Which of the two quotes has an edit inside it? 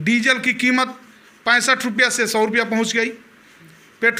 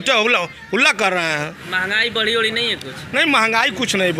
second; 1 cut; at 1.6 s

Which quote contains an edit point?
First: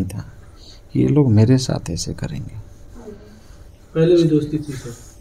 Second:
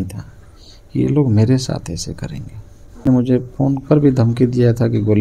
second; 1 cut; at 3.0 s

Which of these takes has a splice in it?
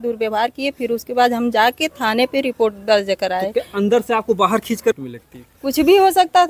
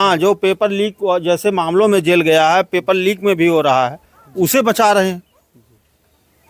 first; 1 cut; at 5.0 s

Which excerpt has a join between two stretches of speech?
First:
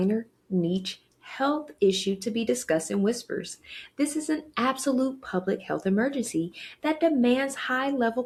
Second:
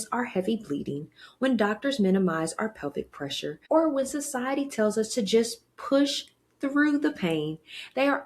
second; 1 cut; at 3.6 s

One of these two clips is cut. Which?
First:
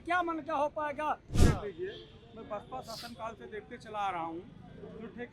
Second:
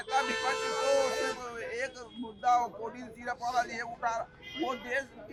first; 1 cut; at 1.4 s

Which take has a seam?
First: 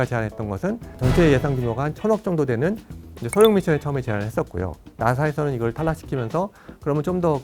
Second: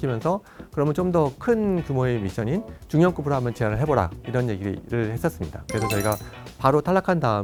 first; 2 cuts; at 0.9 s, 4.8 s

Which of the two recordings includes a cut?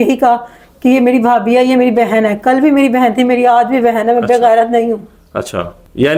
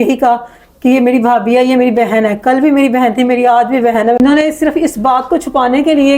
second; 1 cut; at 4.2 s

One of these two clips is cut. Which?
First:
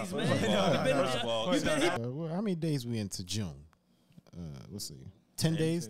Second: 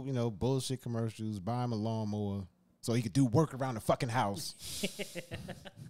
first; 1 cut; at 2.0 s

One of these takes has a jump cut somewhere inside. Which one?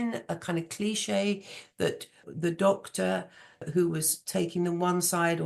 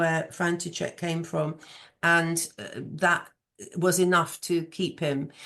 first; 2 cuts; at 2.3 s, 3.6 s

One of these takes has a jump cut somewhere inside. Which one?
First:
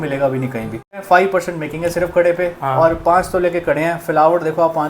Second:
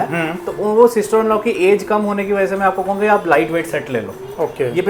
first; 1 cut; at 1.0 s

